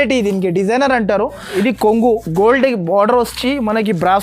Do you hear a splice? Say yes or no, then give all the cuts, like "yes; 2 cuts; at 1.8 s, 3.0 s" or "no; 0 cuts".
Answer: yes; 1 cut; at 1.5 s